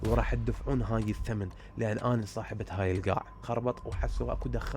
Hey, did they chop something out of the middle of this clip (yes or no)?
yes